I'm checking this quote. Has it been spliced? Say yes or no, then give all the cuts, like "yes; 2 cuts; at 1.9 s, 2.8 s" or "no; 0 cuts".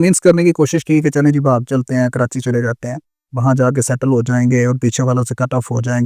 no; 0 cuts